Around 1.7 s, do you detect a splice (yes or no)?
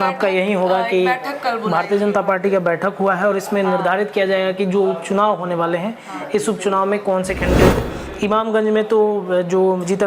no